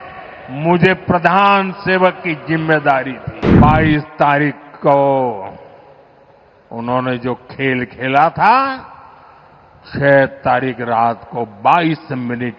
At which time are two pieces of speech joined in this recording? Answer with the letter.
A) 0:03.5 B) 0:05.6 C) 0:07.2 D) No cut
A